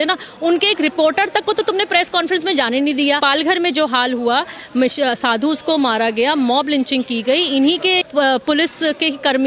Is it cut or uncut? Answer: cut